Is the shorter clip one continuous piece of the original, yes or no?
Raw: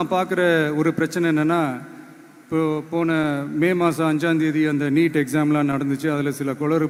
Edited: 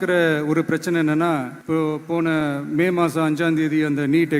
no